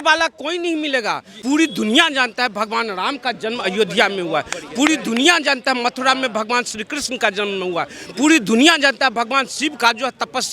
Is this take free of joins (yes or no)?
no